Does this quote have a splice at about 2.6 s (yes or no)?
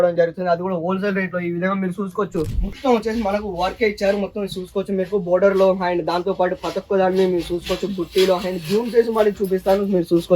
yes